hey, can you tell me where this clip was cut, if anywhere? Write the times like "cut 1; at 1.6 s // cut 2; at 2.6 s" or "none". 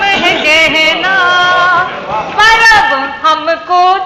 none